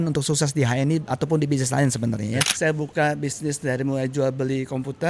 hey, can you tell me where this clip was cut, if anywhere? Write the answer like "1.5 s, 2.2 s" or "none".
2.5 s